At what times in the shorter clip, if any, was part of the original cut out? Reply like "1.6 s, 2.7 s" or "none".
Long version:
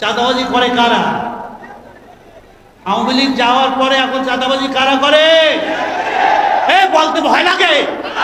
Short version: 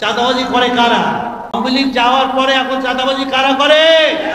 1.5 s